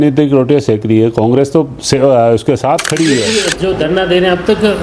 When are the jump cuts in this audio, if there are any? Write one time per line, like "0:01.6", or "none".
0:03.4